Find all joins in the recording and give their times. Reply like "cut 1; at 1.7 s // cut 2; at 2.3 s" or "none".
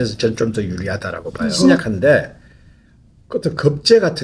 cut 1; at 1.8 s